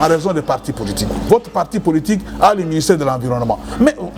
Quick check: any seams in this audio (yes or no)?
yes